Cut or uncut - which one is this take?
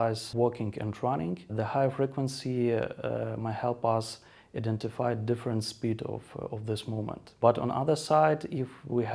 uncut